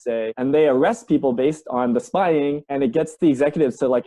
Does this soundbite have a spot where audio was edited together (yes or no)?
no